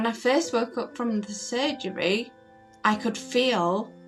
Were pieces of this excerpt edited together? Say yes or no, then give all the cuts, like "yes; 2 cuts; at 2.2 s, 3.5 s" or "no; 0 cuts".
no; 0 cuts